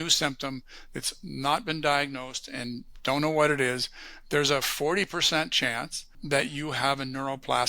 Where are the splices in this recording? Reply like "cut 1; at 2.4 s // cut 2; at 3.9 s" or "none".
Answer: cut 1; at 6.1 s